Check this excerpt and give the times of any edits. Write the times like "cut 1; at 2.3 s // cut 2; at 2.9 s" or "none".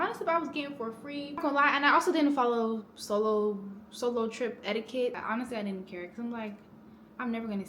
cut 1; at 1.4 s // cut 2; at 5.2 s